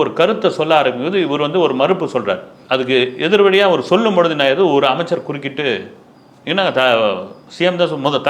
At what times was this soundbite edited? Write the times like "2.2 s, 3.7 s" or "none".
2.6 s